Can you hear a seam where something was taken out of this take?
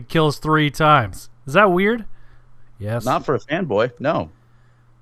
no; 0 cuts

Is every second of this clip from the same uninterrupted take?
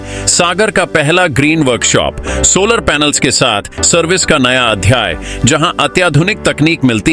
yes; 0 cuts

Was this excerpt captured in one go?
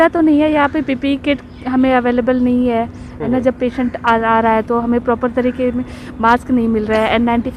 yes; 0 cuts

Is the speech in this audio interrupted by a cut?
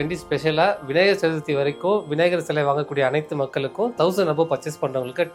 no; 0 cuts

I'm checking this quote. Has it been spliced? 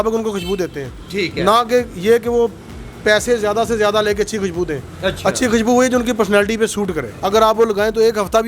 yes; 1 cut; at 7.1 s

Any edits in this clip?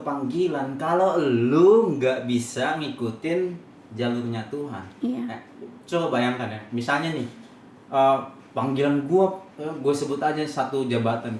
no; 0 cuts

